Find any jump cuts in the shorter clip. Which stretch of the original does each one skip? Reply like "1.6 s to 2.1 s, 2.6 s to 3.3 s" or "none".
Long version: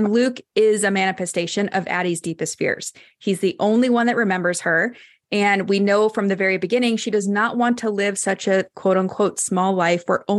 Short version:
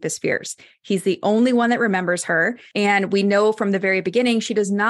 5.0 s to 5.2 s